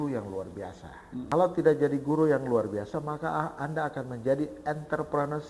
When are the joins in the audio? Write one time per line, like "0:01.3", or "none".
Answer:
0:01.3